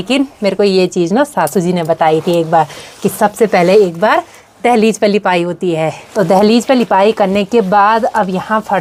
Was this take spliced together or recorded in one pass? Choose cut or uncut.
uncut